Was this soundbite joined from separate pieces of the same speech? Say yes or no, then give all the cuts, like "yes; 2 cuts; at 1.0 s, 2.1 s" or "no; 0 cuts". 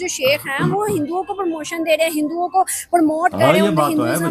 no; 0 cuts